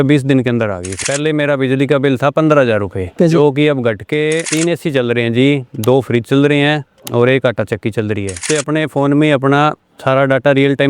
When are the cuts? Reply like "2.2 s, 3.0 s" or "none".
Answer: 1.0 s, 4.5 s, 8.4 s